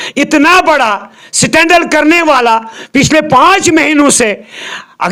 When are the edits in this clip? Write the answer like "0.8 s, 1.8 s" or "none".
none